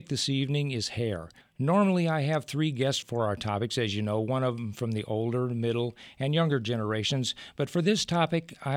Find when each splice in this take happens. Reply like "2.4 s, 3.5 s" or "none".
none